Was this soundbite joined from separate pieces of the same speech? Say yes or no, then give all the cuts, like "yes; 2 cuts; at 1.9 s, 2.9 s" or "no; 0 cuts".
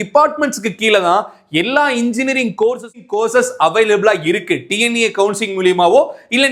yes; 1 cut; at 3.0 s